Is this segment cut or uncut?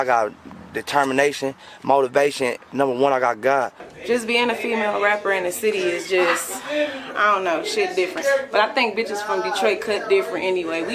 cut